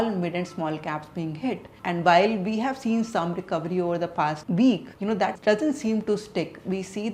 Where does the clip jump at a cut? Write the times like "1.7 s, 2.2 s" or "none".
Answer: none